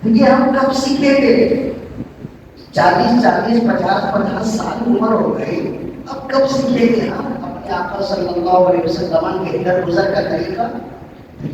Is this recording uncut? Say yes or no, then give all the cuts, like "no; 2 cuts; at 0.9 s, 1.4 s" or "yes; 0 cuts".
yes; 0 cuts